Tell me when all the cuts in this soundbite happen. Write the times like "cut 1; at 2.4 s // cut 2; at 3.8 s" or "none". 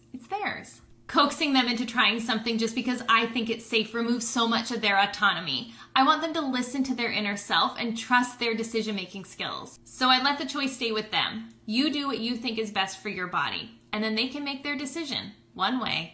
none

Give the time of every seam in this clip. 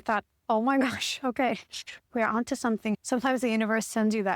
cut 1; at 3.0 s

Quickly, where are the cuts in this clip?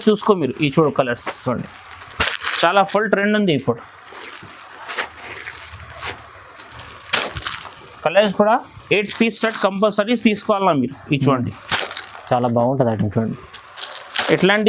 none

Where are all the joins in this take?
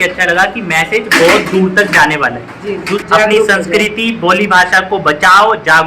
cut 1; at 3.0 s

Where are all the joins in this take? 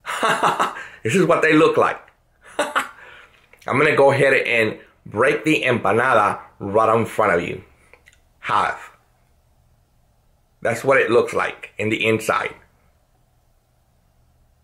none

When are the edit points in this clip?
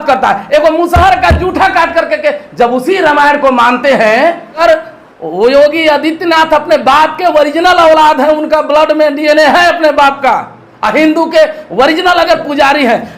cut 1; at 4.6 s

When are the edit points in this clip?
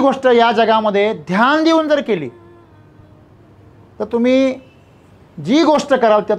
none

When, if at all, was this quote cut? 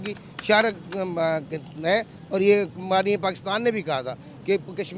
none

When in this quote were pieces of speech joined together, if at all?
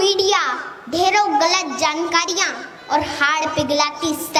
none

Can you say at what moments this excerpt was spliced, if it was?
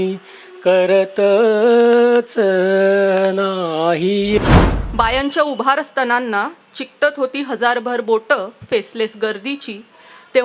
cut 1; at 4.4 s

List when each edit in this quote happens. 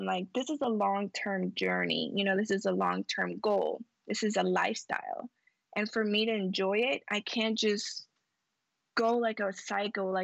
none

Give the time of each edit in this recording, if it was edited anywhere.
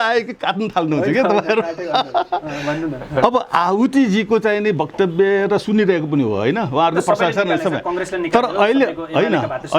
none

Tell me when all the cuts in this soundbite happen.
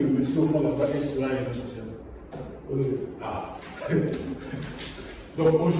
none

